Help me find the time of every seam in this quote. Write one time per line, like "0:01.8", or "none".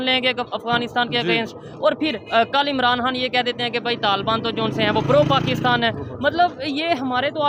none

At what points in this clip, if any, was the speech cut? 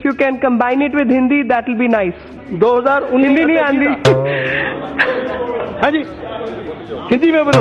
0:02.2

